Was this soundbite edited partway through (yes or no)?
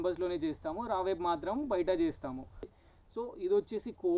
yes